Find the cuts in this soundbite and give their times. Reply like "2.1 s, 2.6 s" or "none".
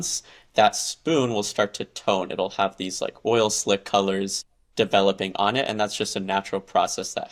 none